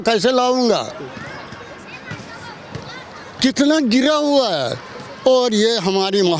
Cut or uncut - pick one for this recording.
uncut